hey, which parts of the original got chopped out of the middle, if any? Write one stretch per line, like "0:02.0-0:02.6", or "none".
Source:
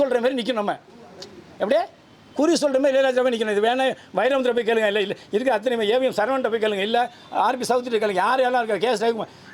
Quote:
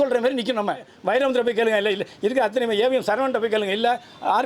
0:00.9-0:04.0